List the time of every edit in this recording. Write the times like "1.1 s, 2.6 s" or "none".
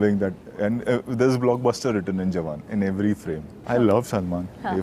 3.5 s